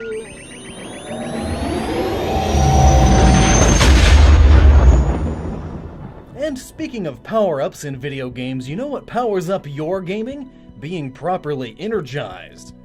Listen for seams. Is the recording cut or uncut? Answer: cut